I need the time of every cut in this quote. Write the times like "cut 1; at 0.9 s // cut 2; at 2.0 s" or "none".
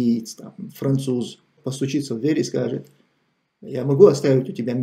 cut 1; at 1.6 s